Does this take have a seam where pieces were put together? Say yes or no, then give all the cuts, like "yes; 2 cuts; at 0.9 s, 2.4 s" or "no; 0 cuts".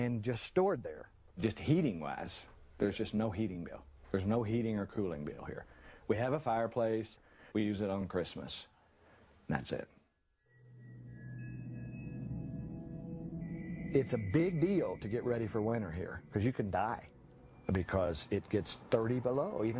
yes; 1 cut; at 14.5 s